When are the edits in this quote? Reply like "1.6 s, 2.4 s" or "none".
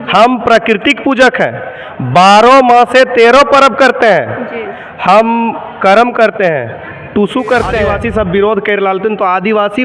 7.9 s